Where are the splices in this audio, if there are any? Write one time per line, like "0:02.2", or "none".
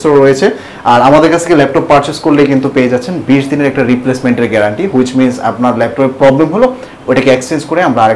none